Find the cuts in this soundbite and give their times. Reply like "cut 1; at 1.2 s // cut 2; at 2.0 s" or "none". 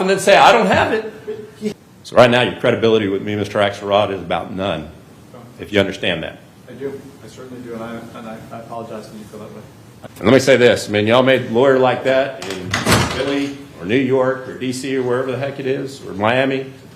cut 1; at 1.7 s // cut 2; at 10.0 s